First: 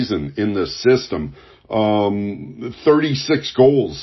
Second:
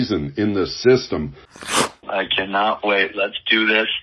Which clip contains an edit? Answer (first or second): second